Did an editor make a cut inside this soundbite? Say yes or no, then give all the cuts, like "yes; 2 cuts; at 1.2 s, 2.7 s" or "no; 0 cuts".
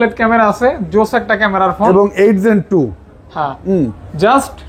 no; 0 cuts